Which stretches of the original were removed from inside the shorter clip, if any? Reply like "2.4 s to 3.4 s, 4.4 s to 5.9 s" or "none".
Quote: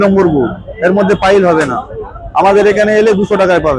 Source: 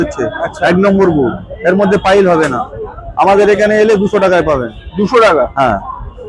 none